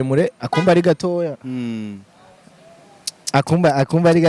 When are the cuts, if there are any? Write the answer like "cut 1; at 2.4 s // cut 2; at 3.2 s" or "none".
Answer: none